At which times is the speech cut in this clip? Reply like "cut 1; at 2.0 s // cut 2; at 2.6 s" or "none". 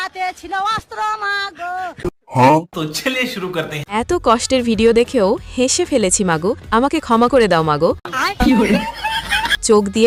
none